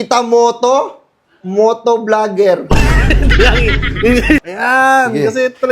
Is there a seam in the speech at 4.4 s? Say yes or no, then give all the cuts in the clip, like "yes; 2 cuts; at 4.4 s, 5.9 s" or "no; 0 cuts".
yes; 1 cut; at 4.4 s